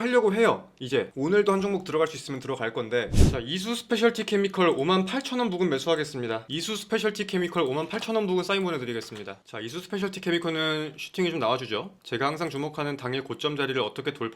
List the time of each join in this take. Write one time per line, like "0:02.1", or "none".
0:03.2
0:09.4